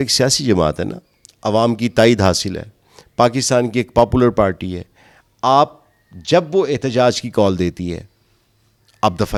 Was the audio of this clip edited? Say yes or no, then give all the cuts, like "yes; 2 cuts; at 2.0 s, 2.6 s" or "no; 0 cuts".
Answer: no; 0 cuts